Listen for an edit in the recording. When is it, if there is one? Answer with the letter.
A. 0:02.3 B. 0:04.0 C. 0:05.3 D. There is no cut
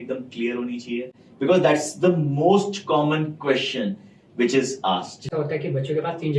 C